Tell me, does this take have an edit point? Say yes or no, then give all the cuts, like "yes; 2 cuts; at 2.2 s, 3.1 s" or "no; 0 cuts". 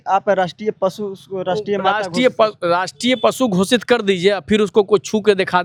no; 0 cuts